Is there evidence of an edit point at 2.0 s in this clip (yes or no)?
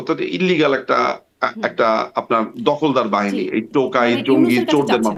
no